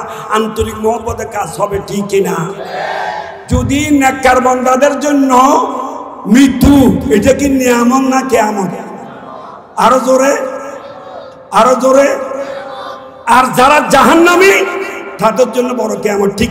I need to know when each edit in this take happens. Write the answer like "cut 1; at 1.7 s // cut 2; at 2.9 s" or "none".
cut 1; at 3.3 s